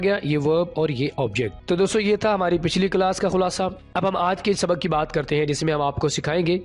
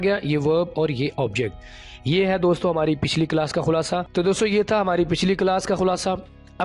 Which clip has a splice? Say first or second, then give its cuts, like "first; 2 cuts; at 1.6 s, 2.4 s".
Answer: first; 2 cuts; at 1.6 s, 3.8 s